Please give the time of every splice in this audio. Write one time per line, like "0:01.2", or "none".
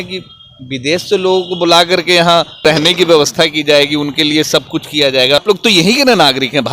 0:02.6
0:05.4